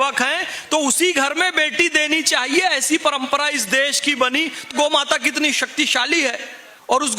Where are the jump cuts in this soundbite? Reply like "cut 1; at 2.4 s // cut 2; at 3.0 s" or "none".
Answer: cut 1; at 4.7 s